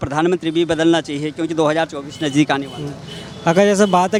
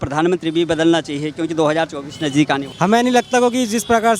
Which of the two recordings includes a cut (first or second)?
second